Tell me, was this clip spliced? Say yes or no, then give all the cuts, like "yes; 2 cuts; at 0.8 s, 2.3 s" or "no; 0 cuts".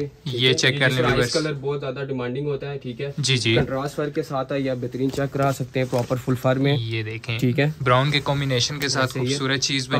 no; 0 cuts